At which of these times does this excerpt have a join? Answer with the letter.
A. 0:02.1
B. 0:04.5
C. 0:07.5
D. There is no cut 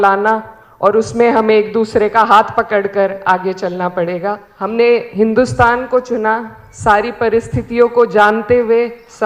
B